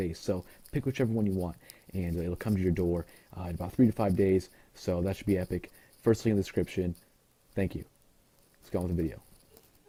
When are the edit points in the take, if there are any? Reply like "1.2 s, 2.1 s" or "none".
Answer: none